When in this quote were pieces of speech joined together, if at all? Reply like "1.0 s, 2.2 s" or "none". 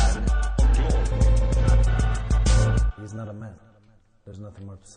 3.0 s